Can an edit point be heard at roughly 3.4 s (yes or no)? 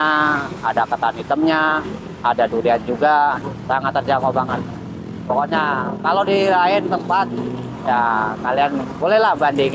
yes